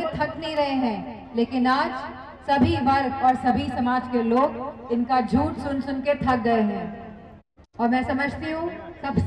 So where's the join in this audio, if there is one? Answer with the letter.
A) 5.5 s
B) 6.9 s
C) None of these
C